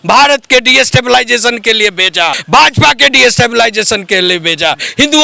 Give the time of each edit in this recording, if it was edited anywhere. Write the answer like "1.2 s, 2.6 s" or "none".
2.4 s

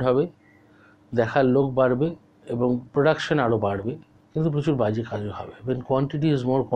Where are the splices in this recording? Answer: 4.1 s

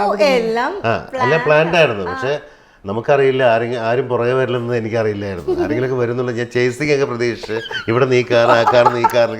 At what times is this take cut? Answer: none

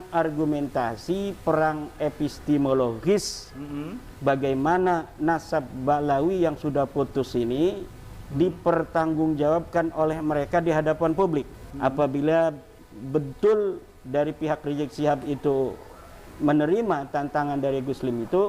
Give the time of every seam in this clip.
11.6 s

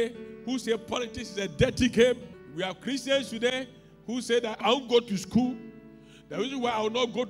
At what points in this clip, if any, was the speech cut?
2.4 s, 4.6 s

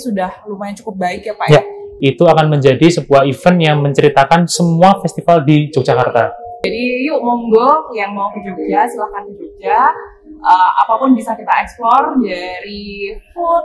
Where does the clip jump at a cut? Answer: 1.8 s, 6.7 s

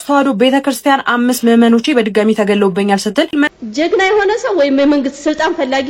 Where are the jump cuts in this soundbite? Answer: 3.5 s

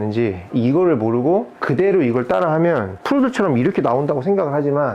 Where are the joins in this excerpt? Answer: none

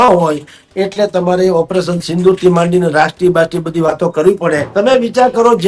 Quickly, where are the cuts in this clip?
4.6 s

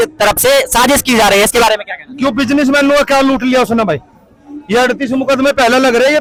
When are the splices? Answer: none

